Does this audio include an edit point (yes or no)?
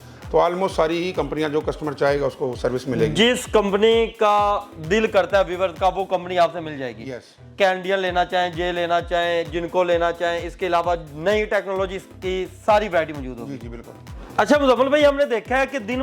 no